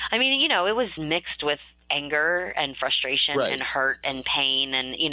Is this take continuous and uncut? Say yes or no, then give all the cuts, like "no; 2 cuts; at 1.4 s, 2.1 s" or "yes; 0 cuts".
no; 1 cut; at 1.0 s